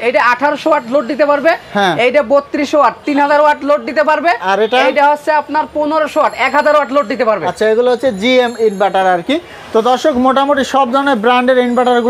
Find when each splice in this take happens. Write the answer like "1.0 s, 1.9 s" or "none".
none